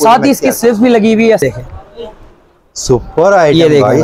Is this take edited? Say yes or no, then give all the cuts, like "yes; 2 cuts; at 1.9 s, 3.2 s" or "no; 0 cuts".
yes; 1 cut; at 1.4 s